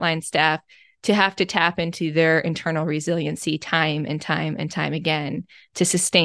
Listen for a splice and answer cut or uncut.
uncut